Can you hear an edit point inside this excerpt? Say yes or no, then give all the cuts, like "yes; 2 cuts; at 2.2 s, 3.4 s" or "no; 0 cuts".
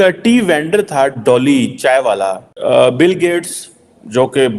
yes; 1 cut; at 2.5 s